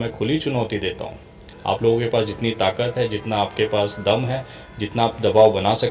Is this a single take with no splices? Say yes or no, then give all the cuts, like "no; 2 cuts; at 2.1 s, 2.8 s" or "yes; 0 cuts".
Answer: yes; 0 cuts